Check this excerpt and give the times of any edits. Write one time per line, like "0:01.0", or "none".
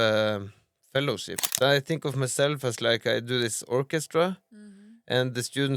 0:01.4